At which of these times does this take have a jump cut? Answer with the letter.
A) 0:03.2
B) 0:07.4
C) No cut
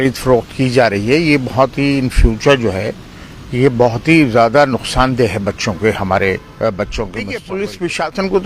B